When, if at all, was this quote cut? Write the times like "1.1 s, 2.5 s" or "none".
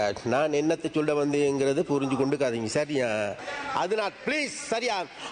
3.5 s